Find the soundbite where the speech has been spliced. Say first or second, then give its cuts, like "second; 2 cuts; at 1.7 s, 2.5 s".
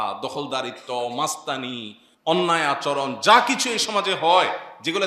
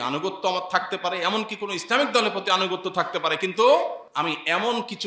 second; 1 cut; at 4.0 s